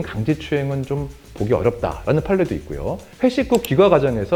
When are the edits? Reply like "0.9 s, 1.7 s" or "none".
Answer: none